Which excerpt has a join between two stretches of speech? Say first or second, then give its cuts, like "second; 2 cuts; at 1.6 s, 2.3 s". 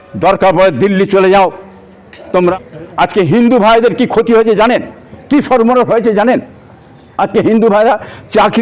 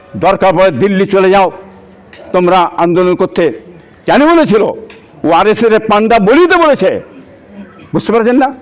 first; 1 cut; at 2.5 s